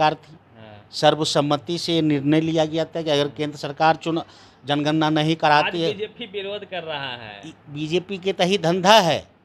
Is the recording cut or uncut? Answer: uncut